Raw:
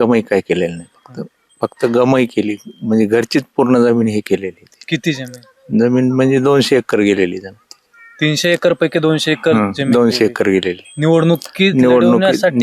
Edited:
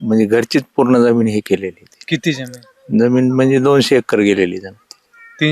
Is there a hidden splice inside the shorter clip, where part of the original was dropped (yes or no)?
no